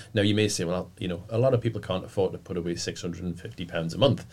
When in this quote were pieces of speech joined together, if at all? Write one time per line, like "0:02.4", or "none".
none